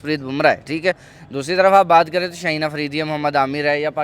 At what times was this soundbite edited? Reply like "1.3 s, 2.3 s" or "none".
none

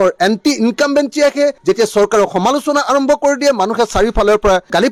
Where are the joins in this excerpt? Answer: none

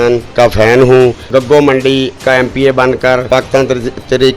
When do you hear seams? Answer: 1.2 s, 2.1 s, 3.2 s

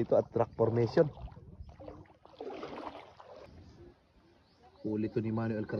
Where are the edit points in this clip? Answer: 3.4 s

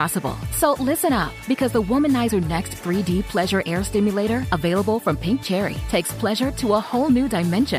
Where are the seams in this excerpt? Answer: none

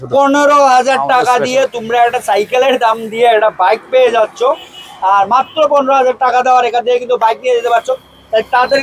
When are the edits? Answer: none

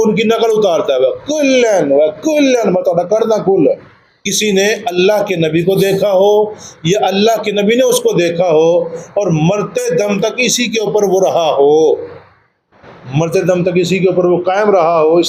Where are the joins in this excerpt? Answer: 4.3 s

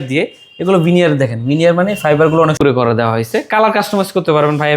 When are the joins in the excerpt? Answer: 2.6 s

